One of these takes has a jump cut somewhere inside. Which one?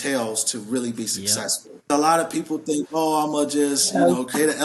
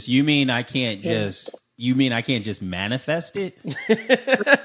first; 1 cut; at 1.9 s

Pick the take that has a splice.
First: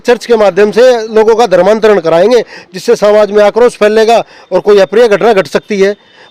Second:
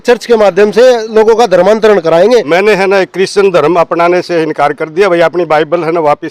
second; 1 cut; at 2.5 s

